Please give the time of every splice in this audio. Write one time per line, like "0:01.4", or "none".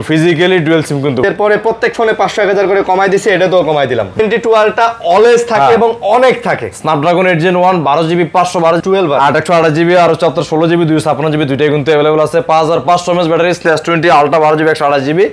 0:01.2
0:04.2
0:08.8
0:13.6

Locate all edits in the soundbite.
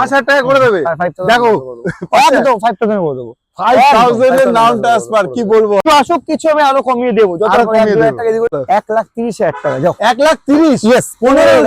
0:05.8
0:08.5

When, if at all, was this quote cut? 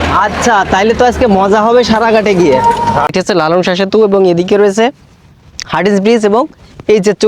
0:03.1

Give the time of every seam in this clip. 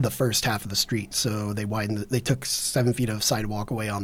none

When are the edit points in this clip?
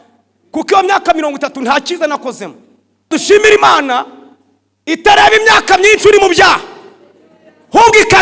0:03.1

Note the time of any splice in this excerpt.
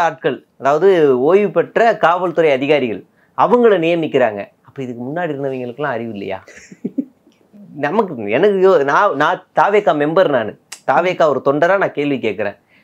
none

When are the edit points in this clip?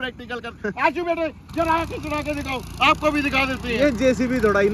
none

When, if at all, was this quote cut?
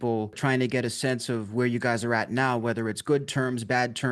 none

